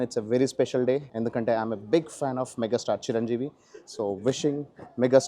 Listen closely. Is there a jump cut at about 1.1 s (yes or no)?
yes